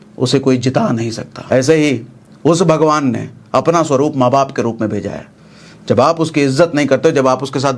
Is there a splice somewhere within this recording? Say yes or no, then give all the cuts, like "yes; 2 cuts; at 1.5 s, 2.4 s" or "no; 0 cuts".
yes; 1 cut; at 1.3 s